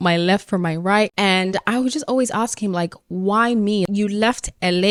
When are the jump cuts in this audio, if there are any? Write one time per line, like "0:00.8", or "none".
none